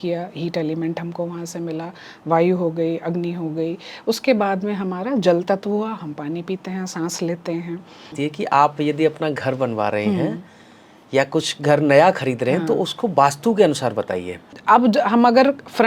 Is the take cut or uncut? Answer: cut